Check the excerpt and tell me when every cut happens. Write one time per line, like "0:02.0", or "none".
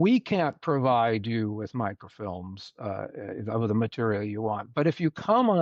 none